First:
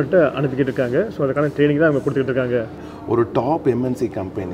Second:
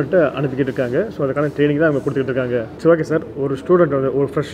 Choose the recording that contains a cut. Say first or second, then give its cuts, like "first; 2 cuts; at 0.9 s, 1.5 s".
first; 1 cut; at 2.7 s